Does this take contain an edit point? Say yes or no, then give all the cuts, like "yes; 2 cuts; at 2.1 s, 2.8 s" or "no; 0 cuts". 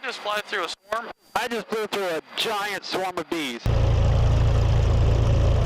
yes; 1 cut; at 3.6 s